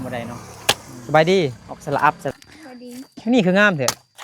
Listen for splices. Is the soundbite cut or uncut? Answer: cut